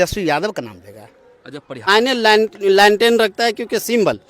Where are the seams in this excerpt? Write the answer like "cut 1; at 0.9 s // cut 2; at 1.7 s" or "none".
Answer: cut 1; at 1.9 s